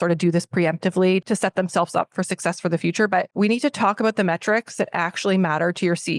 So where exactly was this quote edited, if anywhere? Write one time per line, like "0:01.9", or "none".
0:01.2
0:03.3

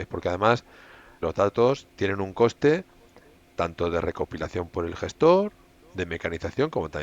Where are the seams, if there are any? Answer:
0:01.2

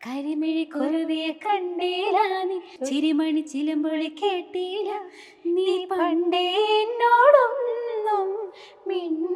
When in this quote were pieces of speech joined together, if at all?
0:02.7

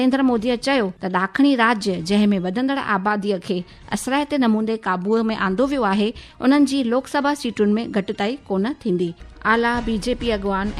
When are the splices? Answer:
0:01.0
0:09.3

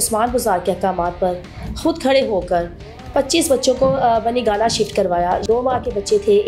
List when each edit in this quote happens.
0:05.4

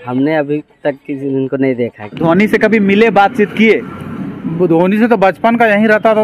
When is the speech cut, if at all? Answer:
0:02.1

